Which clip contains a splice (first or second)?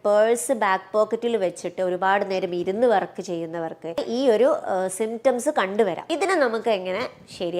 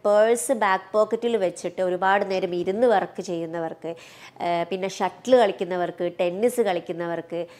first